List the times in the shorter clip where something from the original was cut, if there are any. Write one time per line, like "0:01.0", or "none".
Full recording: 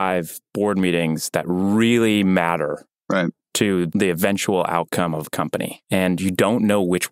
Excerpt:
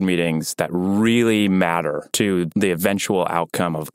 0:02.4